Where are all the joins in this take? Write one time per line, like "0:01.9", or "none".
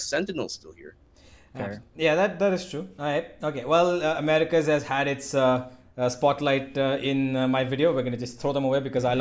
none